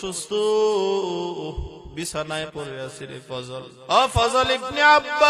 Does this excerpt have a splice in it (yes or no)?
yes